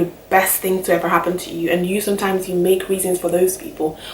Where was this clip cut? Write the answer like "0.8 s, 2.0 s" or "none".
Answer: none